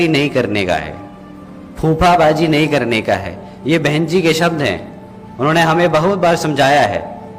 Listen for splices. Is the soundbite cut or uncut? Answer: uncut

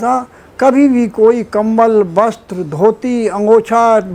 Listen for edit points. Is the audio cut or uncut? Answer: uncut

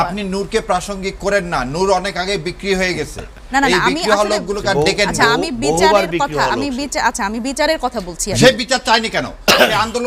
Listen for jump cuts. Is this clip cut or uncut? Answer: uncut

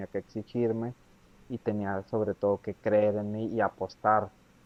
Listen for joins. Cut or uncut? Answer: uncut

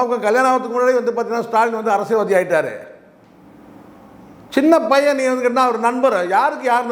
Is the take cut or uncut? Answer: uncut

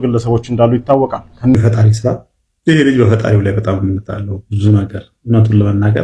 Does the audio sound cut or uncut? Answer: cut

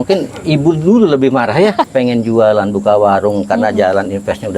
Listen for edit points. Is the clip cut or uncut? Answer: cut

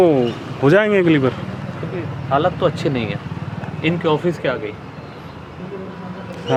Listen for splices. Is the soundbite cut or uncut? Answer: uncut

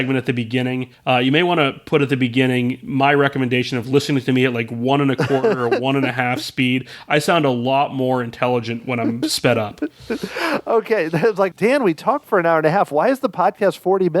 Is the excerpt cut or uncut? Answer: cut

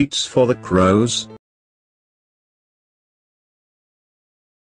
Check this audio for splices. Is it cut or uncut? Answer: uncut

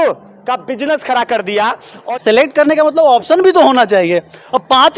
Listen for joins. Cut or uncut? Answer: cut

